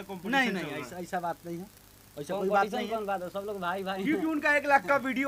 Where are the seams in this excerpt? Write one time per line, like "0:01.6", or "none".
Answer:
none